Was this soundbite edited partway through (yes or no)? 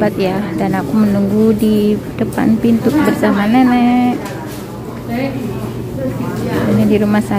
no